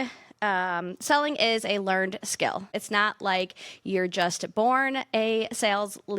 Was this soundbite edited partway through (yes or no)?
yes